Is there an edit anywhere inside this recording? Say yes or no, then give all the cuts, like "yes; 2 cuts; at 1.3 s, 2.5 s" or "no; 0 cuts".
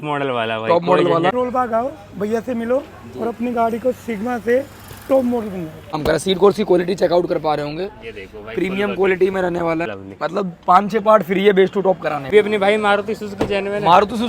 yes; 4 cuts; at 1.3 s, 5.9 s, 10.0 s, 12.3 s